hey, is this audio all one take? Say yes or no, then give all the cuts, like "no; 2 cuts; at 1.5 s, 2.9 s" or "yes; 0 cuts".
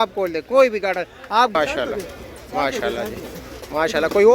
no; 1 cut; at 1.6 s